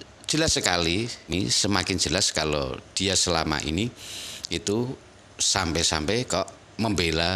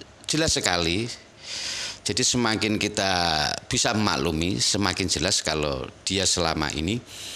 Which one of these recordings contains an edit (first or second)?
first